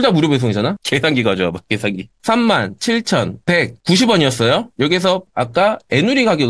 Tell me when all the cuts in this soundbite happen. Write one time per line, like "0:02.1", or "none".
0:00.8
0:02.2
0:05.2